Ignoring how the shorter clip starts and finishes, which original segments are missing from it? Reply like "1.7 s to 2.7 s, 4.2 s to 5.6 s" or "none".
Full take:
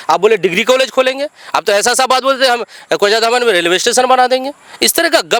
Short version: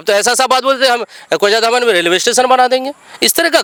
none